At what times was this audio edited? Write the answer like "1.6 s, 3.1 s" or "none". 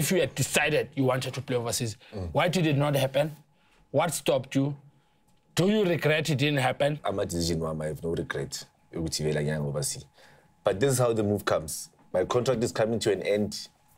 7.0 s